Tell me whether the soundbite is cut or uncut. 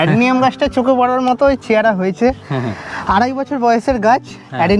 uncut